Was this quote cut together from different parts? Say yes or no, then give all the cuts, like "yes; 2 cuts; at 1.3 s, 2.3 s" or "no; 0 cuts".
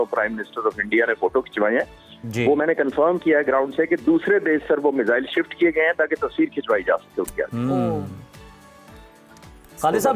no; 0 cuts